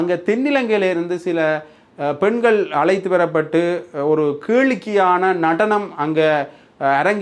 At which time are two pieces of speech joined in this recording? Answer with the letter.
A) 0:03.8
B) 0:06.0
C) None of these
C